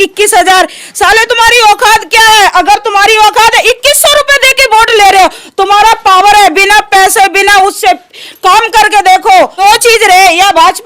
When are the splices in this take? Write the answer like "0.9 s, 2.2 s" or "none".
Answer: 9.5 s

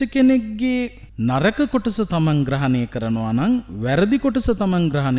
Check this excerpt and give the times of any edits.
1.0 s

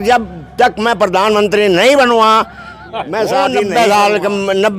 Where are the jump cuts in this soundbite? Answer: 3.7 s

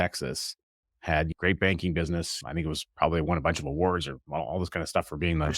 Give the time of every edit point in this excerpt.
1.3 s, 2.4 s

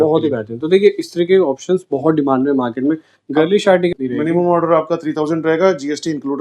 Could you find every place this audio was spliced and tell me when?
3.9 s

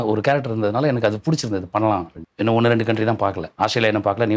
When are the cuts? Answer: 2.2 s, 3.5 s

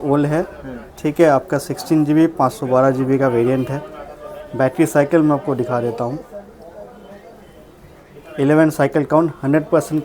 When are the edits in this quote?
none

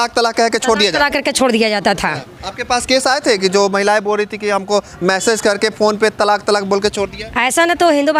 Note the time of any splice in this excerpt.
none

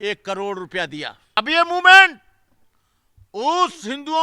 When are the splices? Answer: 1.4 s

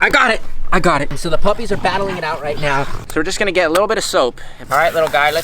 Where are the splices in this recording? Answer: 1.1 s, 3.0 s, 4.5 s

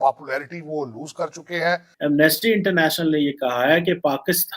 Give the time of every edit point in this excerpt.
1.9 s

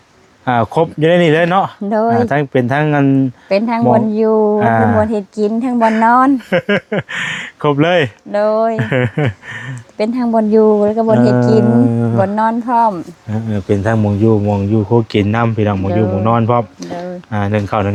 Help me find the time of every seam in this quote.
none

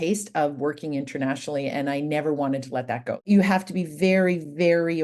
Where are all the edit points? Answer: 3.2 s

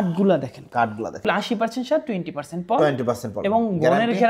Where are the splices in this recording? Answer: 1.3 s

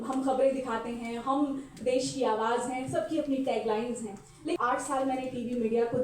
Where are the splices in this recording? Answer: 4.6 s

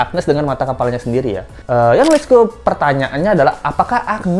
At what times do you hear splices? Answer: none

